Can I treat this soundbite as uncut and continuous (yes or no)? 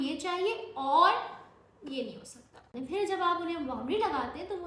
no